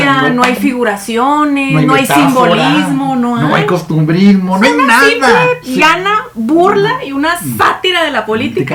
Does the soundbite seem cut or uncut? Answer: uncut